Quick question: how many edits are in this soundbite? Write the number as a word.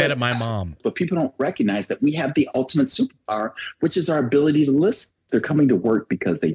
two